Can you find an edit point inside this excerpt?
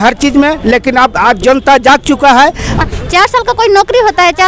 yes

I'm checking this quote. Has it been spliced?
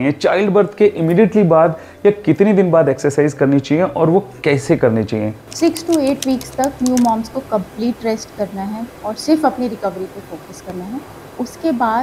no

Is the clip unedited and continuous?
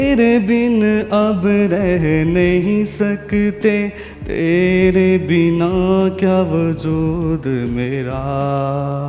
yes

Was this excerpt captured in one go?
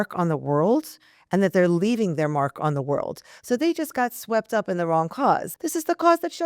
no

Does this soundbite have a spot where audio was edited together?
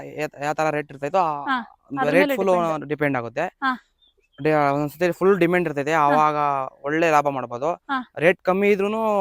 no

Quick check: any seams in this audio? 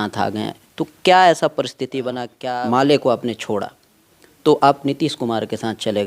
yes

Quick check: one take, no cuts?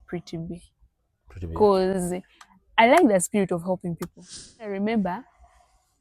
no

